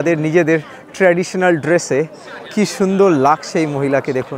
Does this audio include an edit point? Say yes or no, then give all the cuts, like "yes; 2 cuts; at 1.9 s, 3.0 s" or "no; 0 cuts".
no; 0 cuts